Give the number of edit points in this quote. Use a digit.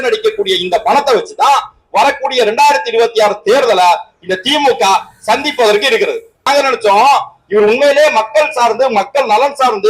1